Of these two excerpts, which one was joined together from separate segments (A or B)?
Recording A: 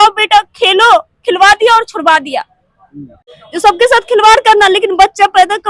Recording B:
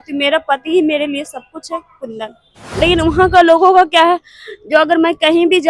B